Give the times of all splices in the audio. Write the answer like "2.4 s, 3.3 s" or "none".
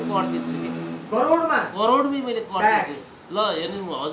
none